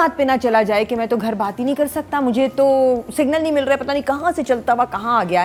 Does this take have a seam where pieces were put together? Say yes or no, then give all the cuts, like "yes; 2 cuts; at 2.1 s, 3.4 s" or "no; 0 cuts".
no; 0 cuts